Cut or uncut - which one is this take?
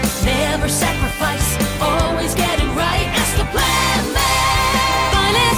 uncut